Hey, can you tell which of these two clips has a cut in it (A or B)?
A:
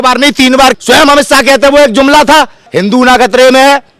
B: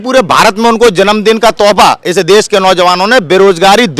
A